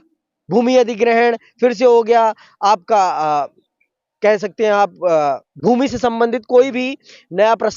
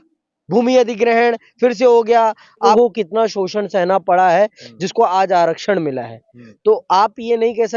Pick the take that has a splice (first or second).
second